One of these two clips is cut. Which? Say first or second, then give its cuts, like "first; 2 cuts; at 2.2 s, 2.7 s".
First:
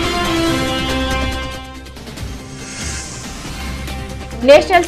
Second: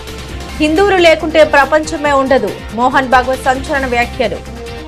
first; 1 cut; at 3.7 s